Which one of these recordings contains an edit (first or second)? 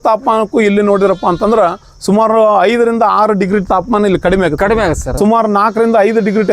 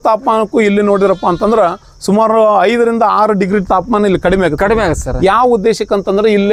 first